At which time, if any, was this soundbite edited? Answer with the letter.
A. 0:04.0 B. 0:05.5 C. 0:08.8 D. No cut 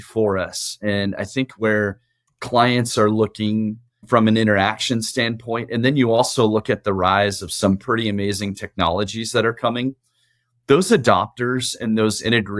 A